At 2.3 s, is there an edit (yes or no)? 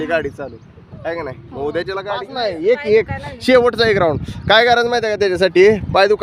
yes